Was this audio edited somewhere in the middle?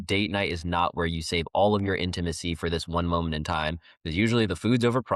no; 0 cuts

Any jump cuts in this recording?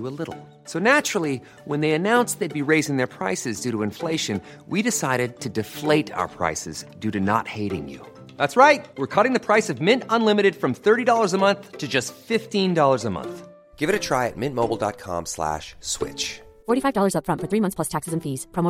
no; 0 cuts

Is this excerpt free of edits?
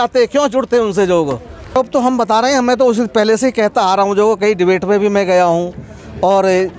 no; 1 cut; at 1.6 s

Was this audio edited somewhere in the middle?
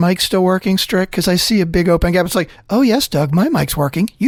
no; 0 cuts

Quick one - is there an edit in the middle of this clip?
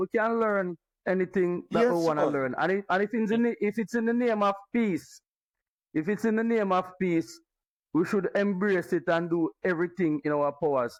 no; 0 cuts

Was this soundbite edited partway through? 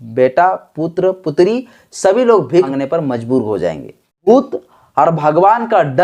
yes; 2 cuts; at 2.7 s, 4.3 s

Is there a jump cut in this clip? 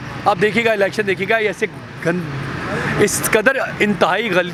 no; 0 cuts

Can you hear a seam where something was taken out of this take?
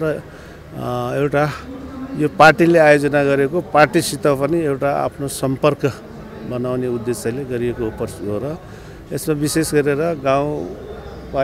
no; 0 cuts

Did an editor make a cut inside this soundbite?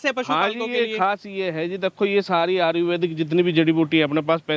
no; 0 cuts

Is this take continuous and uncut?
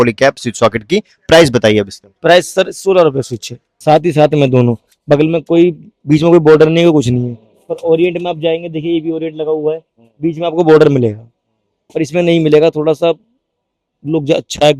no; 1 cut; at 3.6 s

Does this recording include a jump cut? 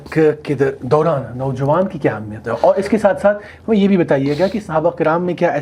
no; 0 cuts

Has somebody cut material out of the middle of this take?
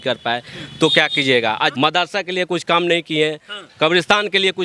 yes; 1 cut; at 1.7 s

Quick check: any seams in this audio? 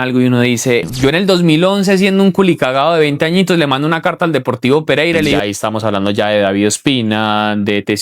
yes; 2 cuts; at 0.9 s, 5.4 s

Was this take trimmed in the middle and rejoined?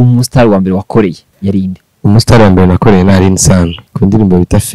yes; 2 cuts; at 1.3 s, 3.8 s

